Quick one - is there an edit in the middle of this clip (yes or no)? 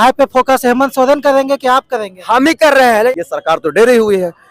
yes